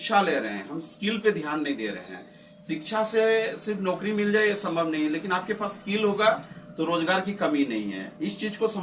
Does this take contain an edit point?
no; 0 cuts

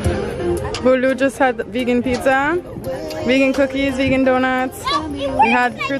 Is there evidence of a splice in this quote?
no; 0 cuts

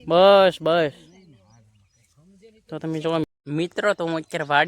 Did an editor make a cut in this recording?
yes; 1 cut; at 3.2 s

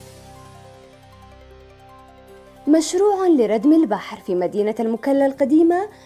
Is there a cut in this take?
yes; 1 cut; at 2.3 s

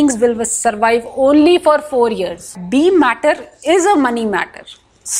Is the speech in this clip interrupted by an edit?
yes; 1 cut; at 2.6 s

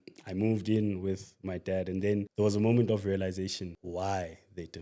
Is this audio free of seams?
no; 2 cuts; at 2.3 s, 3.7 s

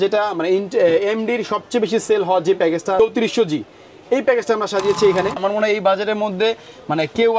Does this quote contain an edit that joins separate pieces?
yes; 2 cuts; at 3.0 s, 5.4 s

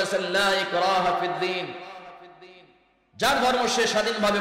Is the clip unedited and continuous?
yes; 0 cuts

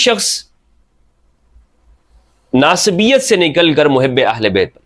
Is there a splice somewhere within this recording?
no; 0 cuts

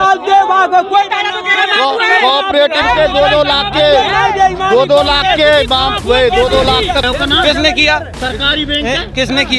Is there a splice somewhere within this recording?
yes; 1 cut; at 7.1 s

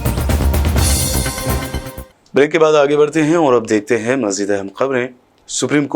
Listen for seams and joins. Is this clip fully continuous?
yes; 0 cuts

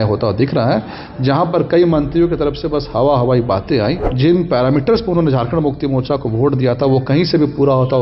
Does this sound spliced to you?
yes; 1 cut; at 4.1 s

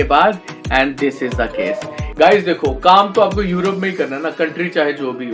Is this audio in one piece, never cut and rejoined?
no; 1 cut; at 2.0 s

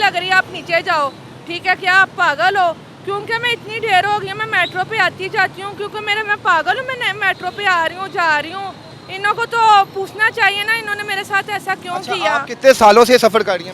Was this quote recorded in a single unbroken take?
yes; 0 cuts

